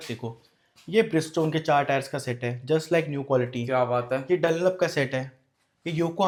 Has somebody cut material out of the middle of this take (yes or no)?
no